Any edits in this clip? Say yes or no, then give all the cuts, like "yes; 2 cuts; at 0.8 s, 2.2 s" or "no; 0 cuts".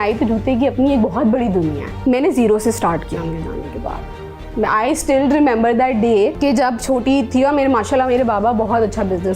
yes; 2 cuts; at 1.9 s, 6.3 s